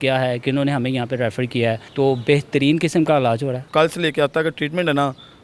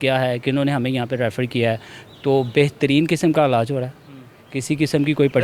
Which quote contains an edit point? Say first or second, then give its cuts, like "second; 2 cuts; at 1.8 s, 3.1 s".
first; 2 cuts; at 1.8 s, 3.7 s